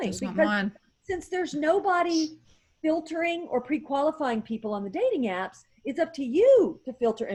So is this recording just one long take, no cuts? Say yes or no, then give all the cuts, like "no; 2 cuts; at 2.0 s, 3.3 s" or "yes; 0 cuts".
yes; 0 cuts